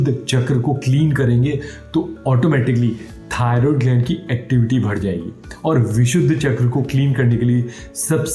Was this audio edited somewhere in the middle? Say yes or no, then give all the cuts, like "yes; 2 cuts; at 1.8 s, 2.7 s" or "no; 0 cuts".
no; 0 cuts